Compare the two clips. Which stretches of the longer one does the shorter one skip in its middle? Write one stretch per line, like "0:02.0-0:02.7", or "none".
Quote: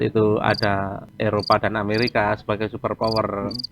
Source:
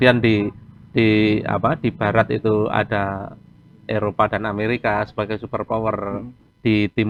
0:03.3-0:03.7